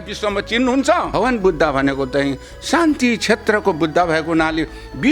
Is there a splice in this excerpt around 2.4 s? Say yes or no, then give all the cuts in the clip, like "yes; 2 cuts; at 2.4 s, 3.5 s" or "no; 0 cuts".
no; 1 cut; at 1.1 s